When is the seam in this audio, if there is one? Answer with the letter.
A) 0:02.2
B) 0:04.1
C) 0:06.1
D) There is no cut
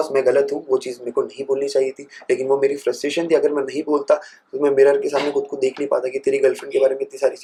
D